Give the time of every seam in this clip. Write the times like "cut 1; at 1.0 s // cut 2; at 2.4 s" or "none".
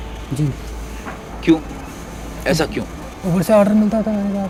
none